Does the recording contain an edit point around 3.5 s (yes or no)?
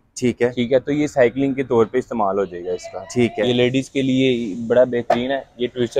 yes